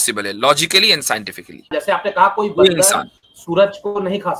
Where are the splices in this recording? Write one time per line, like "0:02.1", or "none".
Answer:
0:01.7

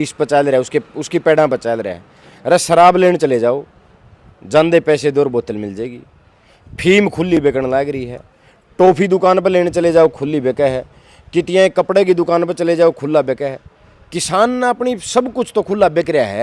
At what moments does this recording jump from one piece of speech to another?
none

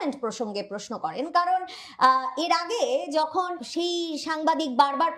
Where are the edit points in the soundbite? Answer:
0:03.6

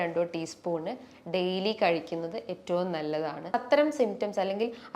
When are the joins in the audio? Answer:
0:03.5

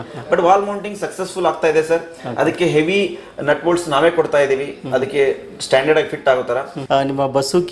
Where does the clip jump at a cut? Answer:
0:06.7

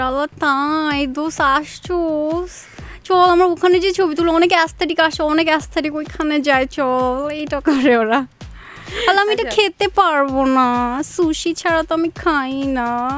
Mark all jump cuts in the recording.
none

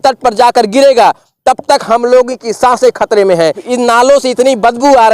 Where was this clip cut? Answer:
0:03.6

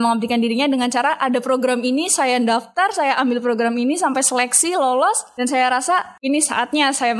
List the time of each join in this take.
0:05.3
0:06.1

